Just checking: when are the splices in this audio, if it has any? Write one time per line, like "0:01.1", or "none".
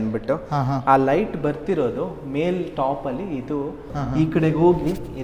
0:03.9

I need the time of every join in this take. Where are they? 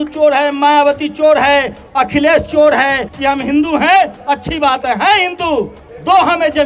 0:03.1

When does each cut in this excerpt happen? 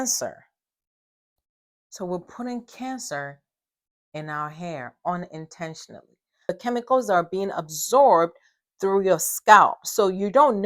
0:06.4

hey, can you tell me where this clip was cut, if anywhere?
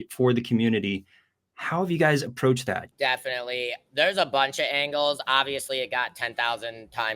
0:02.9

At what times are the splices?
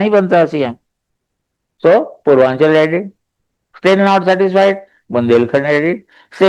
none

